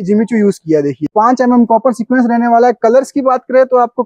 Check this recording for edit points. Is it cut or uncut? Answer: cut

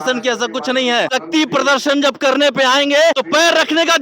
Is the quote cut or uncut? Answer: cut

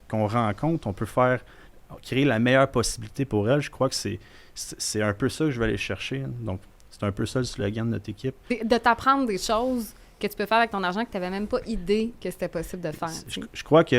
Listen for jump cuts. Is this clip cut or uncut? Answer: cut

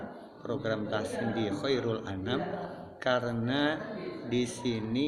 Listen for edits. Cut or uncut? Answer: uncut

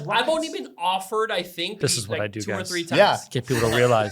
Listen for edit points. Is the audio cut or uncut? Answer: cut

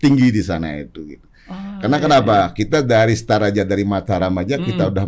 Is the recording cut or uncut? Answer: uncut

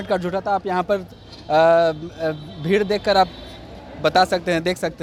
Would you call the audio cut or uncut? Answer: uncut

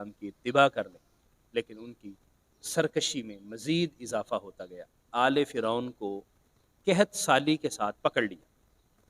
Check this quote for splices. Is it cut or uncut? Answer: cut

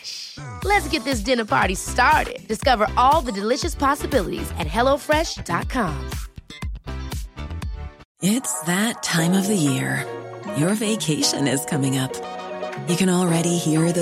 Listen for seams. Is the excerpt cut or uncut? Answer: cut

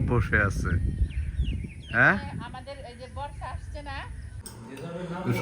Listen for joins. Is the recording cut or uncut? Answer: cut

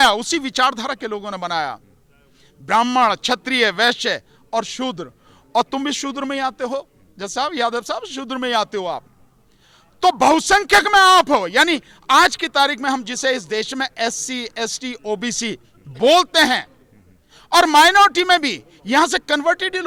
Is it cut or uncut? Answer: uncut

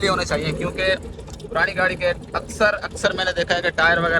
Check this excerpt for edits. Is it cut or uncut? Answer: uncut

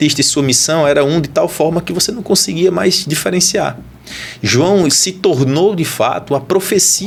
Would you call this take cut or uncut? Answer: uncut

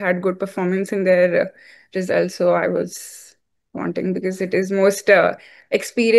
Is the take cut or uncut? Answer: uncut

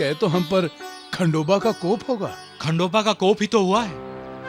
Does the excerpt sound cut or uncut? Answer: uncut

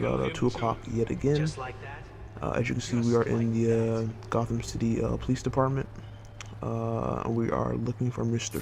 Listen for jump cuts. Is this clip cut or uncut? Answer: cut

